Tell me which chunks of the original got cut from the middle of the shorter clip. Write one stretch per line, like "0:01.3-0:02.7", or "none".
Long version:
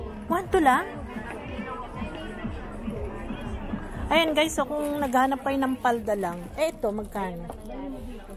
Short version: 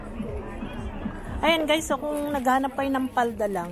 none